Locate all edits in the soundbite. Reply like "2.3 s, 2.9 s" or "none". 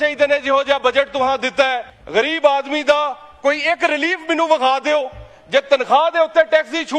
1.9 s